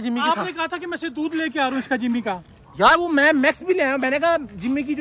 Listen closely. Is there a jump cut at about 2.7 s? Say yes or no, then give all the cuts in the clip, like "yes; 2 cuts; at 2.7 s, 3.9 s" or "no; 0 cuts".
no; 0 cuts